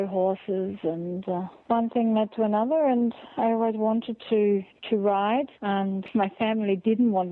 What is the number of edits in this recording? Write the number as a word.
two